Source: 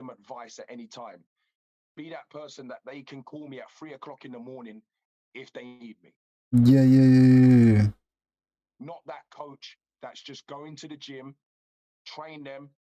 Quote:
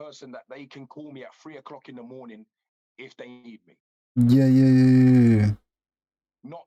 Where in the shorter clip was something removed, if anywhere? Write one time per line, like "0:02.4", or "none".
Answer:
none